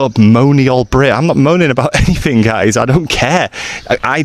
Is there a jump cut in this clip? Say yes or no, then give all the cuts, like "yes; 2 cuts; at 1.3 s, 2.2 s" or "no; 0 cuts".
no; 0 cuts